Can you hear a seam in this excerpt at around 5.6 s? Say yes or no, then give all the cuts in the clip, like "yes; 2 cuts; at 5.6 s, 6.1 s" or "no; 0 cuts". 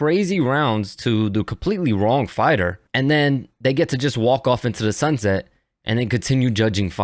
no; 1 cut; at 2.8 s